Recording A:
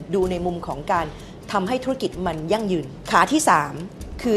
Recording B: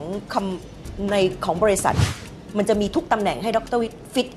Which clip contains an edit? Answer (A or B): A